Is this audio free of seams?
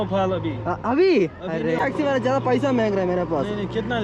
no; 1 cut; at 1.8 s

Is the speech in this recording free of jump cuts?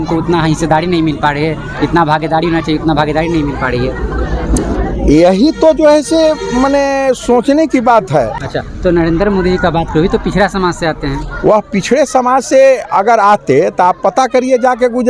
no; 1 cut; at 8.5 s

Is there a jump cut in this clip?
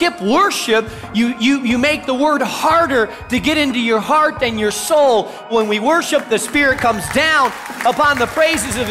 yes; 1 cut; at 5.5 s

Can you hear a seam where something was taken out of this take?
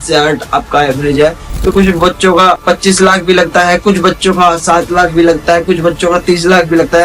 yes; 2 cuts; at 1.7 s, 2.6 s

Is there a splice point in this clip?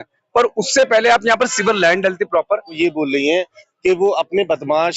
yes; 1 cut; at 2.8 s

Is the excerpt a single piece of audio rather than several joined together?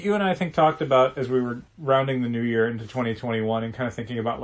no; 1 cut; at 1.7 s

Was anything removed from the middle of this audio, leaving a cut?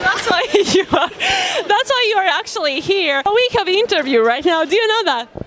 yes; 1 cut; at 3.3 s

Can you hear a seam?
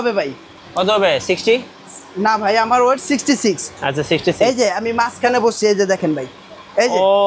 no; 0 cuts

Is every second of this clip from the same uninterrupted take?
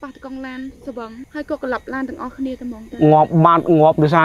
no; 1 cut; at 1.2 s

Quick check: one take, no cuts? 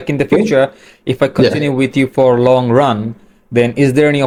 yes; 0 cuts

